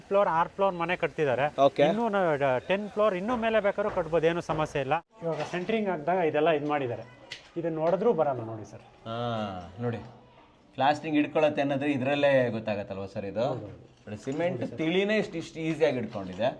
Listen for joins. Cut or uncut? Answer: cut